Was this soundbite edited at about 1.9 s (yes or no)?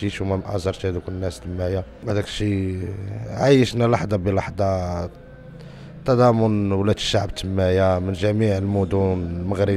yes